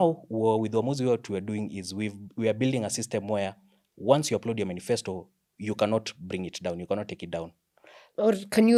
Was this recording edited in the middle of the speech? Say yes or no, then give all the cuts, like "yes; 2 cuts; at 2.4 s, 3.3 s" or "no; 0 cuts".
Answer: no; 0 cuts